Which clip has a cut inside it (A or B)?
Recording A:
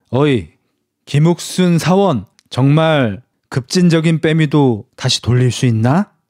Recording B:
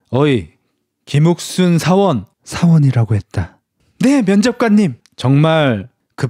A